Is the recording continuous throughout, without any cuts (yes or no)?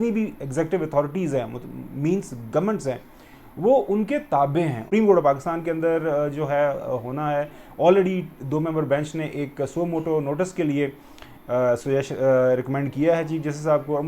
no